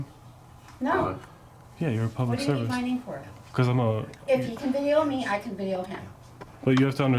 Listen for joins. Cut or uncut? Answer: uncut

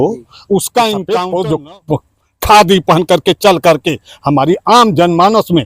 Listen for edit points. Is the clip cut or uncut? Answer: cut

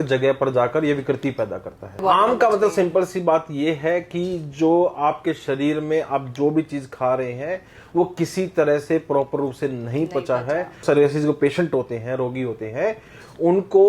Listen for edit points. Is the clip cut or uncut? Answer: cut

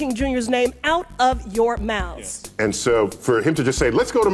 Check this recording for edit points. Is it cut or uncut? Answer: cut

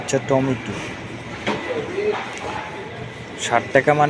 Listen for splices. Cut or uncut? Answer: uncut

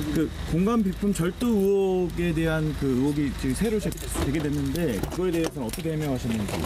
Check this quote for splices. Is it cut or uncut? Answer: cut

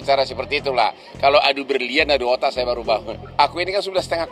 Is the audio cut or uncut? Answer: cut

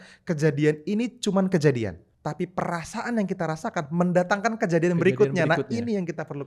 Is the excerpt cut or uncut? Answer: cut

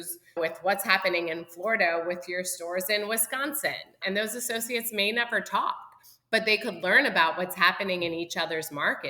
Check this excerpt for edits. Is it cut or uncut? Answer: cut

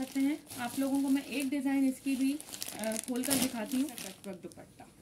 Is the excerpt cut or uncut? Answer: cut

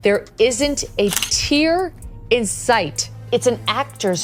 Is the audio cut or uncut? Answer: uncut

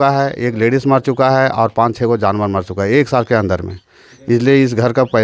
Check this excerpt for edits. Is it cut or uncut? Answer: uncut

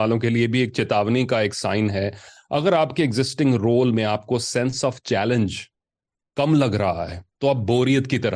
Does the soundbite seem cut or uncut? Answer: uncut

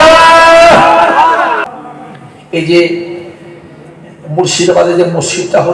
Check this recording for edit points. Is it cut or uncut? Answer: cut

